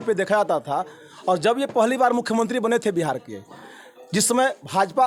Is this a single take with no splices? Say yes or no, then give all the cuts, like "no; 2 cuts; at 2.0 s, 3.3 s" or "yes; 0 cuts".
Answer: yes; 0 cuts